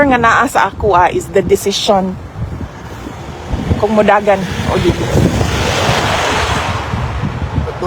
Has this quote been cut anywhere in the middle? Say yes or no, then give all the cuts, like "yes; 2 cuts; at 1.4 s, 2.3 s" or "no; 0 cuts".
no; 0 cuts